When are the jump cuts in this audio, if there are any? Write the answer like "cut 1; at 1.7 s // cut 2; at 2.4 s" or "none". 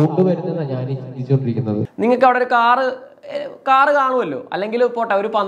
cut 1; at 1.9 s